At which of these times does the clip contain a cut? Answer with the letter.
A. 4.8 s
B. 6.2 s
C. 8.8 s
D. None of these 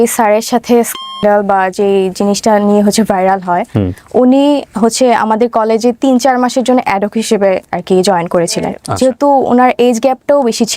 C